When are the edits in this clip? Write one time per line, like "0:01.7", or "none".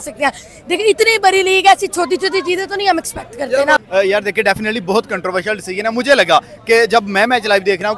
none